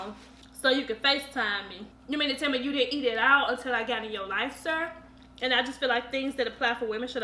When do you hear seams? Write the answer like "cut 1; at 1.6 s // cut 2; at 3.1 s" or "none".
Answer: cut 1; at 2.0 s // cut 2; at 5.0 s